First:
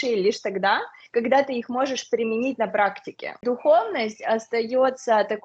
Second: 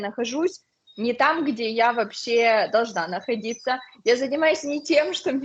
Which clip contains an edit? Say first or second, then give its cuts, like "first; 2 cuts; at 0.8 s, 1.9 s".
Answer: first; 1 cut; at 3.4 s